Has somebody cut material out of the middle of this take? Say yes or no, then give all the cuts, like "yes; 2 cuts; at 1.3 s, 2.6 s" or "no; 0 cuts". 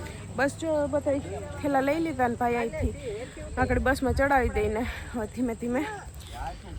no; 0 cuts